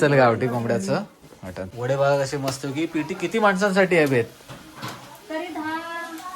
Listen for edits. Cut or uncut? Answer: cut